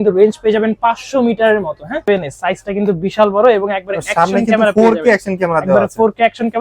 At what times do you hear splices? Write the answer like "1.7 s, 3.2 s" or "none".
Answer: 2.1 s